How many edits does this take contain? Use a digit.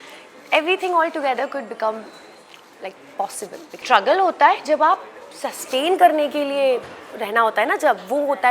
1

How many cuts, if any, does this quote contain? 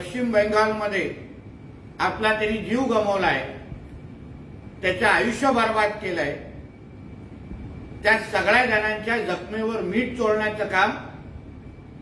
0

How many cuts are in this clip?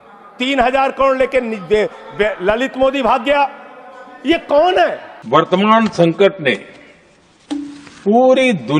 1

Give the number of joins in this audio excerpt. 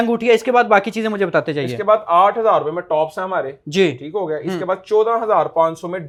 0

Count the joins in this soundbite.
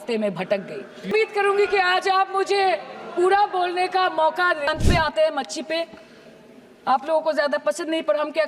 2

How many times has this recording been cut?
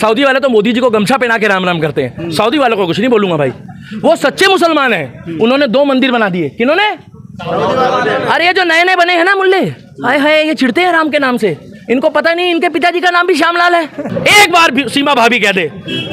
1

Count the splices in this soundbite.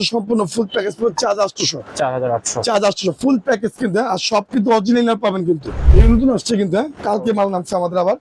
1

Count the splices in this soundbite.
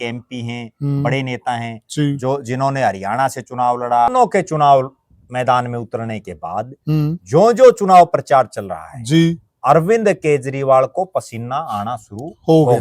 1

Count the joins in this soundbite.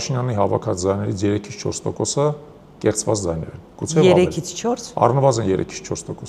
0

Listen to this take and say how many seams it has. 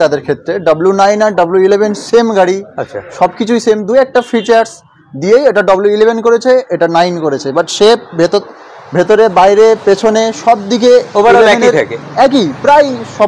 0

